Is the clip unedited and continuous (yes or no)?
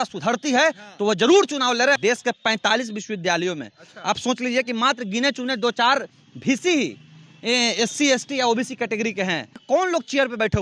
no